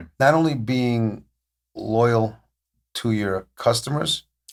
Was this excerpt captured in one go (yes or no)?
yes